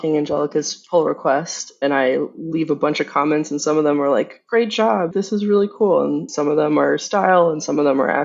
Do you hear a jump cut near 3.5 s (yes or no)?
no